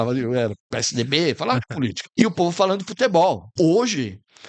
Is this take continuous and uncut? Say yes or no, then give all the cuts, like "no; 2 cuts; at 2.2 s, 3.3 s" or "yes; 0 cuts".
no; 2 cuts; at 2.0 s, 3.5 s